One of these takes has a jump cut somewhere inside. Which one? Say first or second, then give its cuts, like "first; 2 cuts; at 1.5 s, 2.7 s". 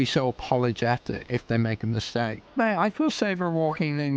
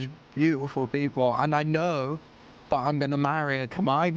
first; 2 cuts; at 1.2 s, 2.4 s